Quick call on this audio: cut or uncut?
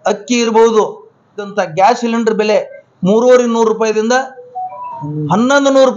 cut